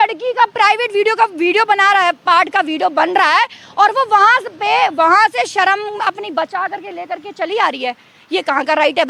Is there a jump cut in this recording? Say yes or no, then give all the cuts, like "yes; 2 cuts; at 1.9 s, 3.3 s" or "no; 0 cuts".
no; 0 cuts